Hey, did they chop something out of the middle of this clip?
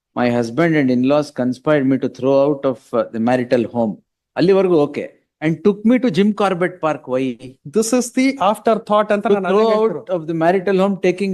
no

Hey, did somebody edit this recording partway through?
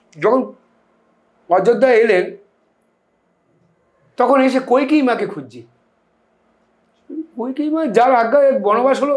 no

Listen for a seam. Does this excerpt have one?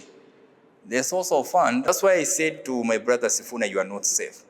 yes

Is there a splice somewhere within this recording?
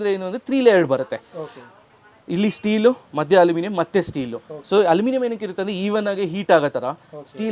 no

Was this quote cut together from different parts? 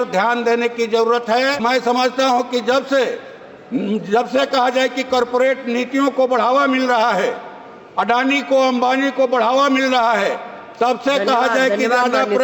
yes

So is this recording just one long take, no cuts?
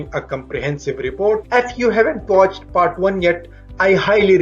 no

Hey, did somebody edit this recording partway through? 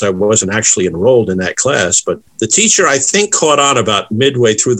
yes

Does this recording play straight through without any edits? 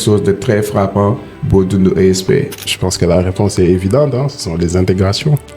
no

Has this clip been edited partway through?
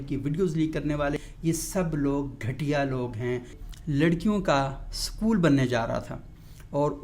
yes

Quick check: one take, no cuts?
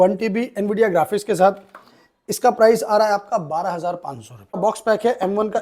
no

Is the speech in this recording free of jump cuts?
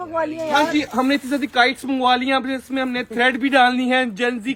yes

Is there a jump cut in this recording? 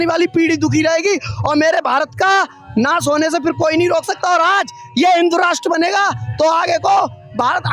no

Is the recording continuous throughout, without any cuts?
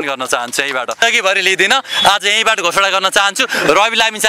no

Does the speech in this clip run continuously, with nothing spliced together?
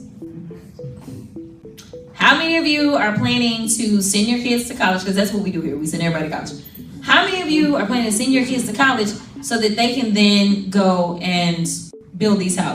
no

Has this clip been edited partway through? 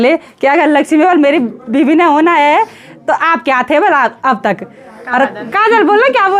no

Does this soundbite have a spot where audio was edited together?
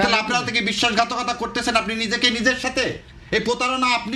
no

